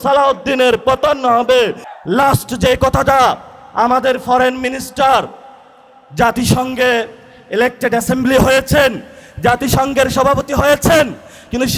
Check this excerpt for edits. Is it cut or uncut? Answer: cut